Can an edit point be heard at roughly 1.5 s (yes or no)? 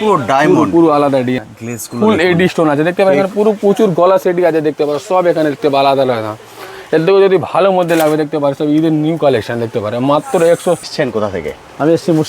yes